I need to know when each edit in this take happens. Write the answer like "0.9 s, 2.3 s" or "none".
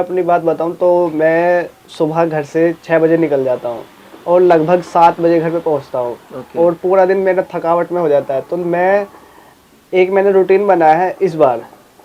none